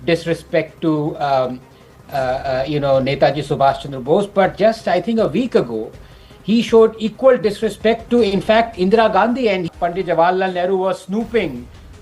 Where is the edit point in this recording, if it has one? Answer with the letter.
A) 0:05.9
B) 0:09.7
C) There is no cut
B